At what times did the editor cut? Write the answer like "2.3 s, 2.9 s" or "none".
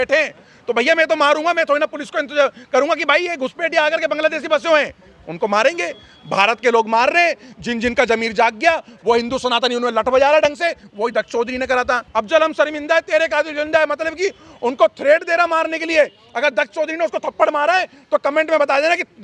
12.0 s